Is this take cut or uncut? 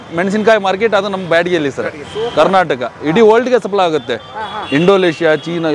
uncut